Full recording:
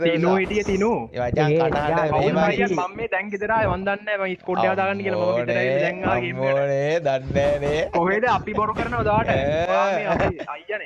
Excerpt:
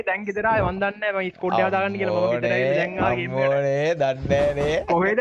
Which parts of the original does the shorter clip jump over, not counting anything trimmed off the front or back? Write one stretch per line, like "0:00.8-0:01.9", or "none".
none